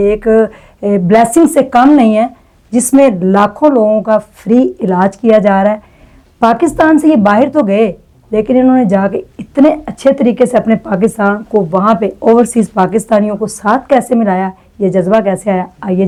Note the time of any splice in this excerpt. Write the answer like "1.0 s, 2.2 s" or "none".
none

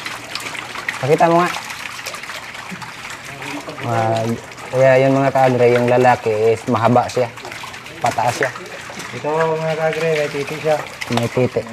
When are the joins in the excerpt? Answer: none

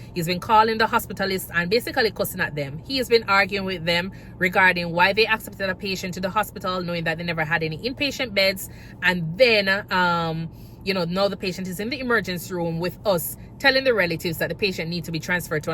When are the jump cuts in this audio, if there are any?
none

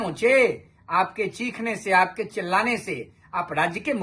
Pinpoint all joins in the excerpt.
none

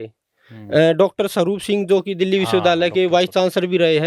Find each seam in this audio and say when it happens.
none

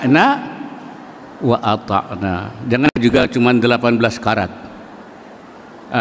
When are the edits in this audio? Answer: 2.9 s

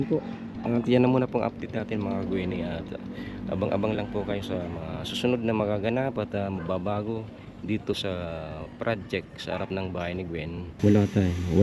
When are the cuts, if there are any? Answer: 10.7 s

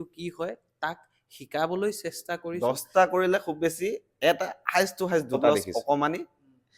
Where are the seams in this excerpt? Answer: 2.5 s, 5.5 s

